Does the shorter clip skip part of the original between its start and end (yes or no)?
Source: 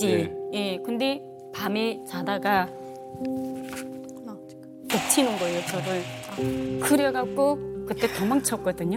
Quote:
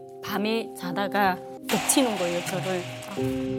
yes